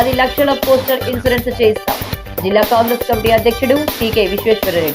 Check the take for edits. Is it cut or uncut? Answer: uncut